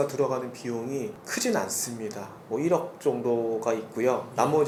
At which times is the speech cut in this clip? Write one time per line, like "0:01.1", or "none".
none